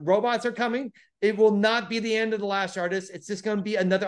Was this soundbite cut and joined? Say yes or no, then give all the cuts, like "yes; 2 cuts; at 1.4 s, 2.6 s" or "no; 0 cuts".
no; 0 cuts